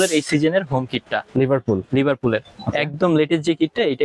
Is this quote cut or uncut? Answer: uncut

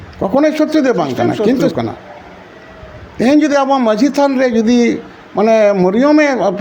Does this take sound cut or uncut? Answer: cut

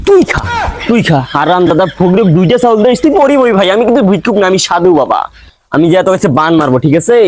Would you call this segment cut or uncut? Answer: uncut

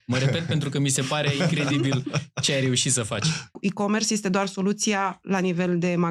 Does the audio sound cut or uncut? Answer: cut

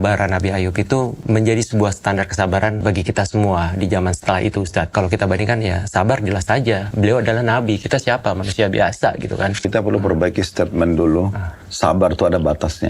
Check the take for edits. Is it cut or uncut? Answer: cut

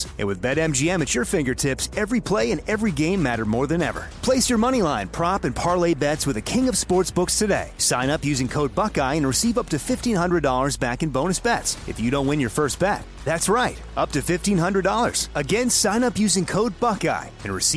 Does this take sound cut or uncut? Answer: uncut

